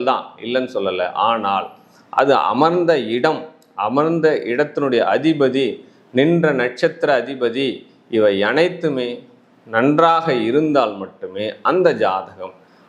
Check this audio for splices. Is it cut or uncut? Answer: uncut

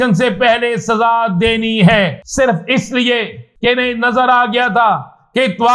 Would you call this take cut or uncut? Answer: cut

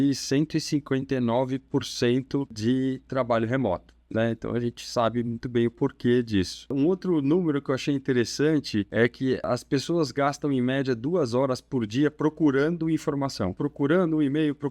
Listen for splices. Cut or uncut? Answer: cut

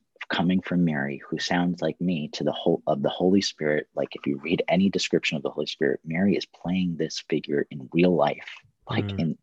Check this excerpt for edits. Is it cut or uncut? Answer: uncut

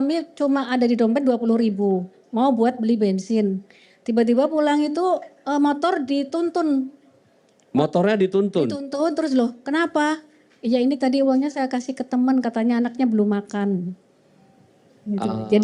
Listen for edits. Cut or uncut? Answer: uncut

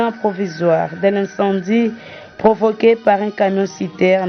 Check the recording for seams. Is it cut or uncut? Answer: uncut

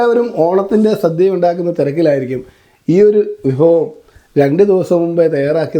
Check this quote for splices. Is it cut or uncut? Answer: uncut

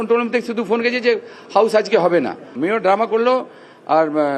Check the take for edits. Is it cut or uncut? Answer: uncut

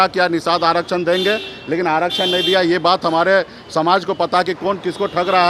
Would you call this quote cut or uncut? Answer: uncut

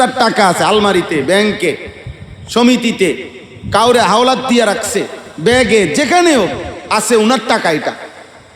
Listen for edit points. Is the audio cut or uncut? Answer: cut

